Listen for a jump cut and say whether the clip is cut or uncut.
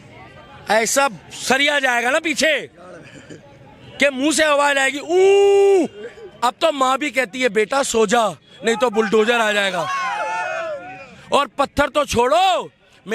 cut